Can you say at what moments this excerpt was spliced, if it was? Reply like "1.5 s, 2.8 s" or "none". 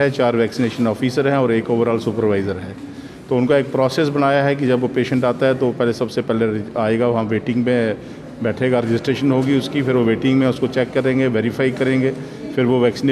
none